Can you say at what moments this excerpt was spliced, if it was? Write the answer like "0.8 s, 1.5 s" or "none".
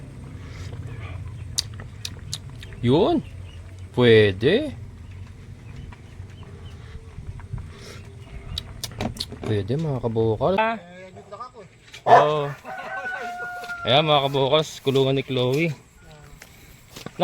10.6 s